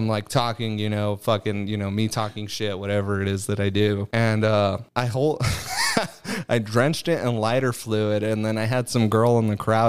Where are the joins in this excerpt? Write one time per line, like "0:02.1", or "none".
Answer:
0:04.1
0:04.8

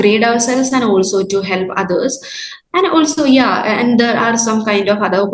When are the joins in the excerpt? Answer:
none

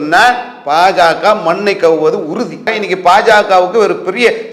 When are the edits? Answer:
0:02.7

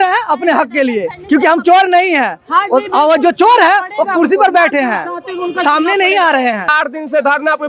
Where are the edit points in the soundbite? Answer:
0:06.7

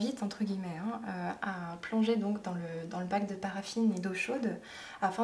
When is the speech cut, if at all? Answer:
none

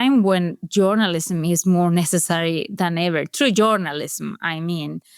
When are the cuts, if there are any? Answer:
none

